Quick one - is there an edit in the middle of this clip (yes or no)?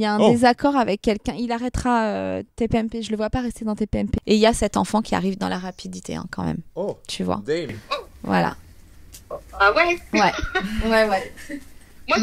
yes